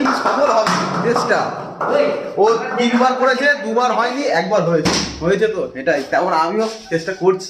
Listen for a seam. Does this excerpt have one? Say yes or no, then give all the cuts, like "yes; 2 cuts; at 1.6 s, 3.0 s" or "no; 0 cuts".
no; 0 cuts